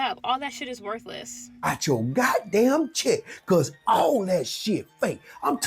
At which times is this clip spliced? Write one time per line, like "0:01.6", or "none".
0:01.7